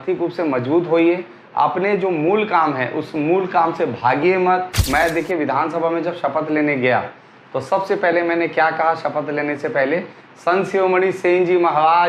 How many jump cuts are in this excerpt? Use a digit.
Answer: 1